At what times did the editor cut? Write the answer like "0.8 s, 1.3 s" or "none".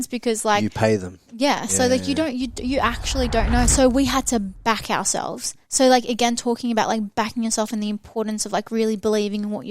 3.7 s